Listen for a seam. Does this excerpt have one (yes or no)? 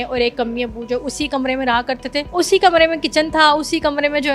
yes